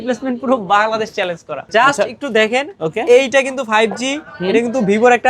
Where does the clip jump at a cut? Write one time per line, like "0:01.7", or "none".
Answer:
0:01.6

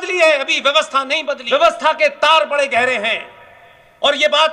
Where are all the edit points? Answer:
0:01.4

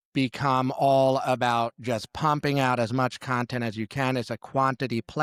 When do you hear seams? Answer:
none

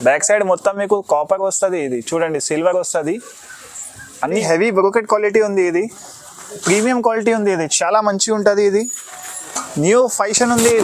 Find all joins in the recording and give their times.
0:04.3

